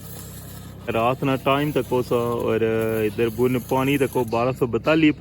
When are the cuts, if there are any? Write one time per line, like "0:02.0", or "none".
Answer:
0:00.9